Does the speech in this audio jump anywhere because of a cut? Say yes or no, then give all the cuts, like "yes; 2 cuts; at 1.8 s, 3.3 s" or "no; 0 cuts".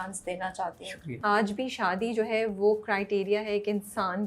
yes; 1 cut; at 1.2 s